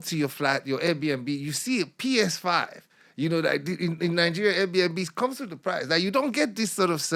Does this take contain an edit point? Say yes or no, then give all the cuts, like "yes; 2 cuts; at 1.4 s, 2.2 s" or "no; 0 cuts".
no; 0 cuts